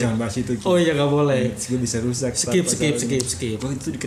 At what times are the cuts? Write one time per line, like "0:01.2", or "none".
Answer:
none